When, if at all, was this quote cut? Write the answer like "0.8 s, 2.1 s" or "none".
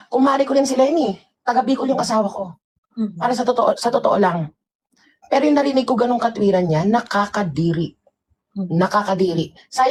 none